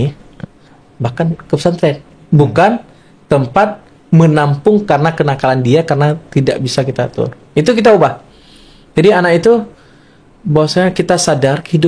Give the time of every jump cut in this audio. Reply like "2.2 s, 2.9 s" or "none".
none

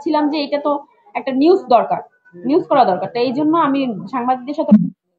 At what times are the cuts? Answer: none

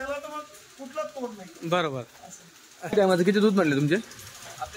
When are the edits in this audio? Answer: 2.9 s

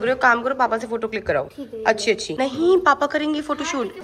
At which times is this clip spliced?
none

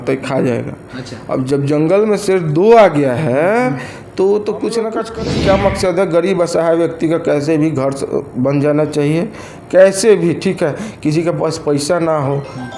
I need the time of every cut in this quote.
5.0 s

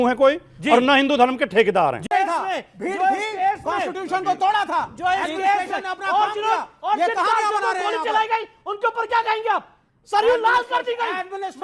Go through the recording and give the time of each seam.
2.0 s

